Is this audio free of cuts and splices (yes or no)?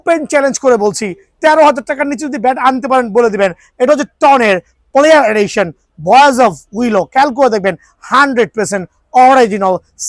yes